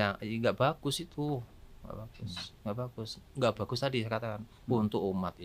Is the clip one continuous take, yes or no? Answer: yes